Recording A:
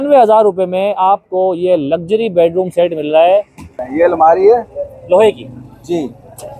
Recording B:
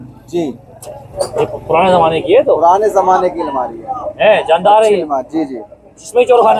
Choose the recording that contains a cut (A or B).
A